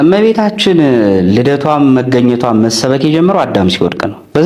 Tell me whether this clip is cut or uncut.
uncut